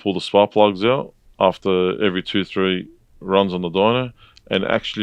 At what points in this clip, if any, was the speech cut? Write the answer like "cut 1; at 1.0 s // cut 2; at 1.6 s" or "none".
none

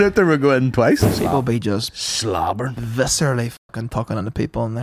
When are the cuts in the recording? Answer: cut 1; at 1.0 s

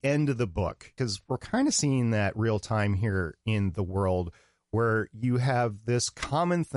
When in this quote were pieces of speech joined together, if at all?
cut 1; at 0.9 s

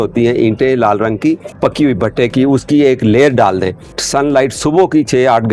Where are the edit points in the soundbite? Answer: cut 1; at 1.5 s // cut 2; at 4.0 s

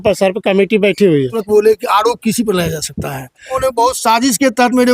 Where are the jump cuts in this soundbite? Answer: cut 1; at 1.4 s // cut 2; at 3.5 s

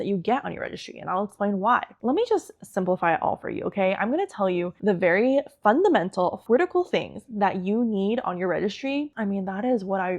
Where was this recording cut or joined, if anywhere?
cut 1; at 1.9 s // cut 2; at 4.7 s // cut 3; at 6.4 s // cut 4; at 9.1 s

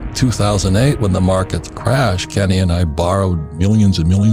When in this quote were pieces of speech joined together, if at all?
none

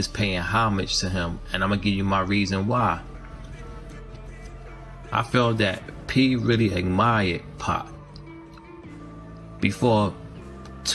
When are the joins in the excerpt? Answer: cut 1; at 7.9 s // cut 2; at 9.6 s

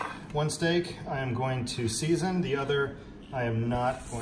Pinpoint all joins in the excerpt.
none

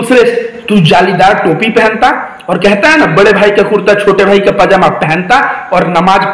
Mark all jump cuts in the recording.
none

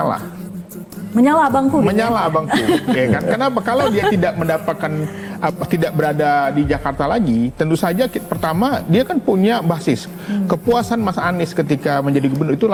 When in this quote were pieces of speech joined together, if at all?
none

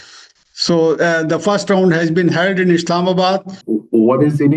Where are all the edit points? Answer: cut 1; at 3.5 s

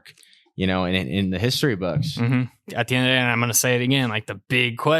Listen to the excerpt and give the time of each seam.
cut 1; at 2.7 s

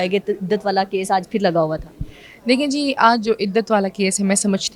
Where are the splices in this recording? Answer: none

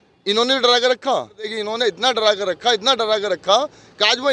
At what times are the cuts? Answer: cut 1; at 1.6 s

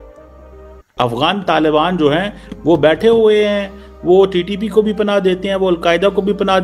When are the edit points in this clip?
cut 1; at 0.9 s

